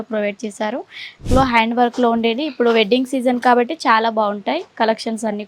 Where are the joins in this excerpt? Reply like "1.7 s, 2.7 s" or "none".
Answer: 1.3 s

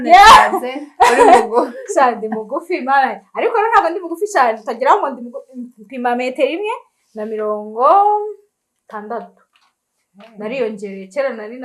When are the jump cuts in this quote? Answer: none

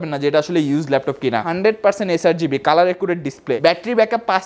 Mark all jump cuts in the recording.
1.5 s, 3.6 s

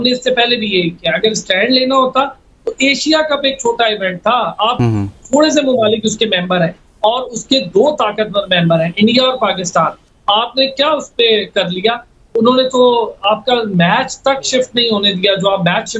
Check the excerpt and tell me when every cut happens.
none

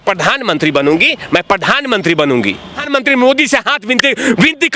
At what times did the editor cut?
2.8 s

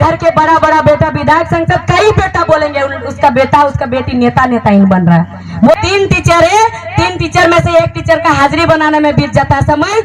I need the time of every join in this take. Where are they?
5.8 s

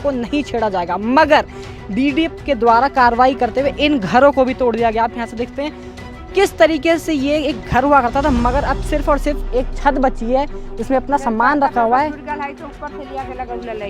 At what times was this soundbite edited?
none

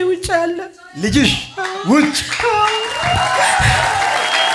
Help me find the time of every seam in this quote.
none

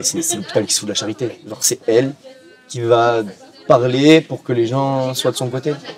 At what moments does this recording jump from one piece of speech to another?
none

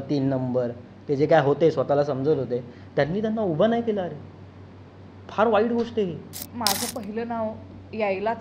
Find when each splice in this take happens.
6.4 s

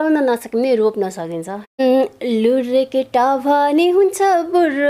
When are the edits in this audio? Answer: 1.8 s

